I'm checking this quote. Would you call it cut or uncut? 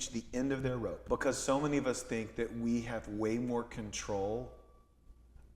cut